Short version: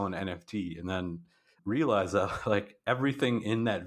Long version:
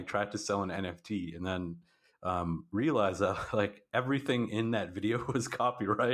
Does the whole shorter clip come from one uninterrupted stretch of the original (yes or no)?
no